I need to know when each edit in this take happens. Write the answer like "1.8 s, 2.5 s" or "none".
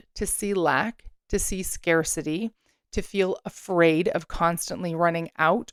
none